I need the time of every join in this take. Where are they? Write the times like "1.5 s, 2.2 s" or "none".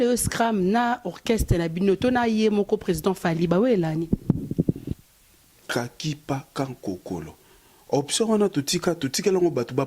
4.9 s